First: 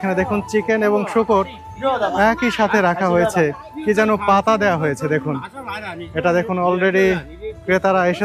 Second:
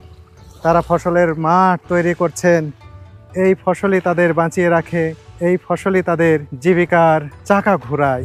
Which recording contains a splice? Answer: second; 3 cuts; at 5.2 s, 6.5 s, 7.3 s

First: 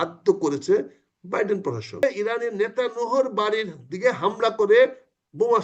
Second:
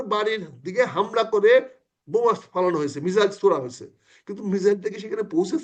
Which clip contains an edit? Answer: first; 1 cut; at 2.0 s

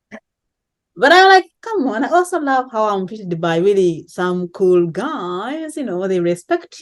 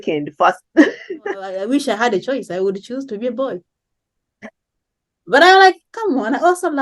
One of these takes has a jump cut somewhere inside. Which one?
second; 1 cut; at 1.5 s

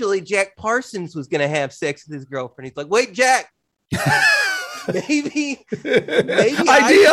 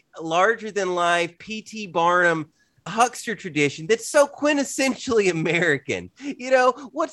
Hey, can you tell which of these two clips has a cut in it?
second; 1 cut; at 2.9 s

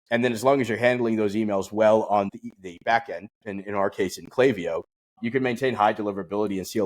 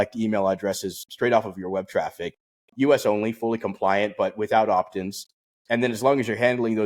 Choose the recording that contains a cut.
first; 1 cut; at 2.3 s

